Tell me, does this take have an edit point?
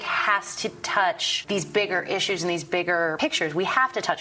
yes; 2 cuts; at 1.3 s, 3.1 s

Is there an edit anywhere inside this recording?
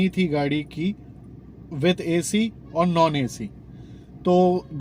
no; 0 cuts

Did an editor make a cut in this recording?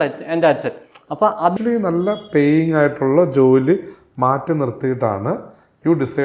yes; 1 cut; at 1.5 s

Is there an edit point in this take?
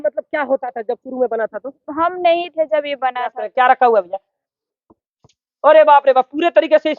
yes; 1 cut; at 3.4 s

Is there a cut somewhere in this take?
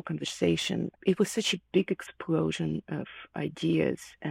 yes; 1 cut; at 0.9 s

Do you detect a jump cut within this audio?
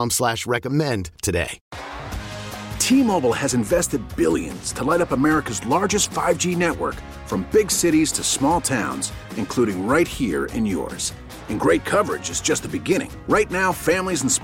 yes; 1 cut; at 1.7 s

